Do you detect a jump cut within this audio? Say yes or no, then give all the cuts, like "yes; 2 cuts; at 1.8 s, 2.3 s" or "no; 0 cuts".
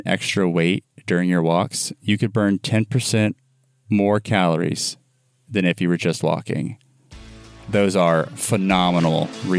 no; 0 cuts